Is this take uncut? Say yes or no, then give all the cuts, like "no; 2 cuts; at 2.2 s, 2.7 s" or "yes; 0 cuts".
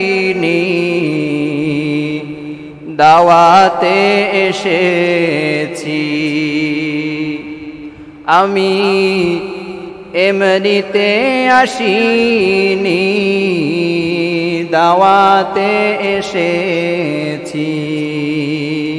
yes; 0 cuts